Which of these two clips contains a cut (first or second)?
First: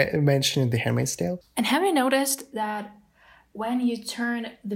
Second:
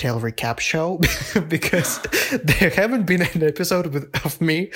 first